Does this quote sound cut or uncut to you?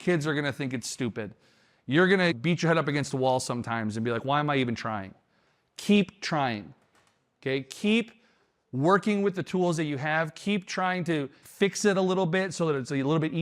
cut